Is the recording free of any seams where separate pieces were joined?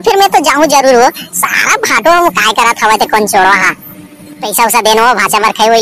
no; 1 cut; at 4.5 s

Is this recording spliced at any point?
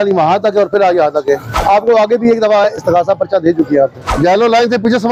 no; 0 cuts

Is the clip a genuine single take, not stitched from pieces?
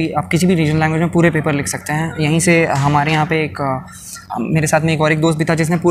yes; 0 cuts

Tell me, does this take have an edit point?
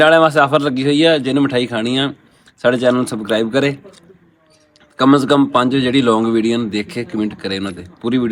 no; 0 cuts

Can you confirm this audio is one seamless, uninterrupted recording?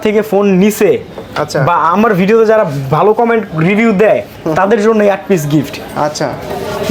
yes; 0 cuts

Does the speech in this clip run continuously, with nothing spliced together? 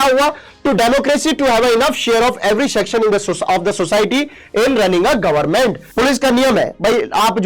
no; 1 cut; at 5.8 s

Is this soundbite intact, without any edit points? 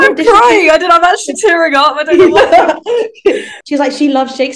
no; 1 cut; at 3.5 s

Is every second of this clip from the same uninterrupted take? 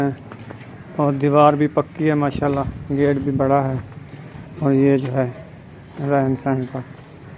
yes; 0 cuts

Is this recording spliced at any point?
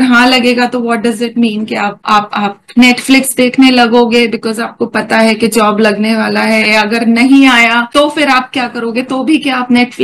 no; 0 cuts

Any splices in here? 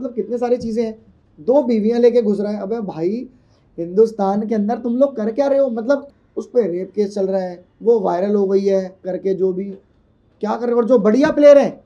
yes; 2 cuts; at 6.1 s, 9.0 s

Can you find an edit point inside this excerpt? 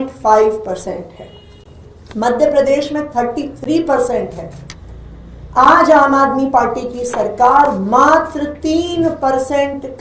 no; 0 cuts

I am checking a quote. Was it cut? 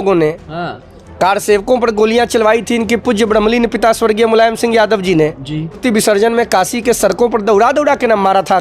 yes; 1 cut; at 5.8 s

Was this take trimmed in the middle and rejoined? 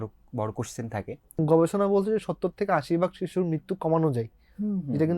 yes; 1 cut; at 1.4 s

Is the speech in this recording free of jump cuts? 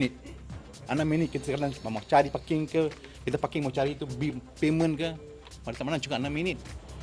yes; 0 cuts

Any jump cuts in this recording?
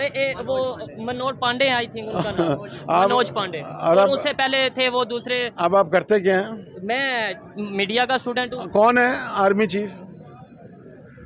no; 0 cuts

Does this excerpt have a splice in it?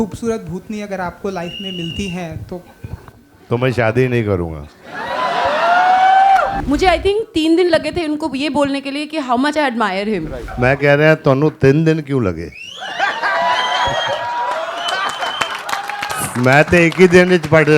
yes; 2 cuts; at 6.5 s, 10.4 s

